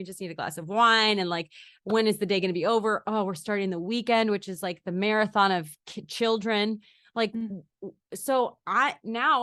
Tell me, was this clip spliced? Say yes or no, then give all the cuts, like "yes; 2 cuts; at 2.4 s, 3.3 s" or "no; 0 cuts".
no; 0 cuts